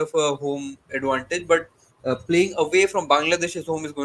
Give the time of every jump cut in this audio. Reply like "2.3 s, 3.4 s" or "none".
none